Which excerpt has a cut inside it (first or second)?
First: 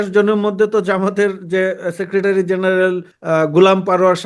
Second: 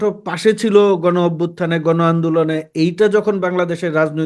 first